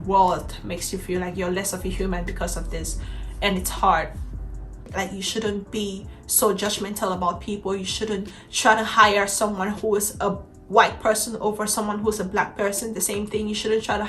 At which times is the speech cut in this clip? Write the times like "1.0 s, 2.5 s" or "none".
4.6 s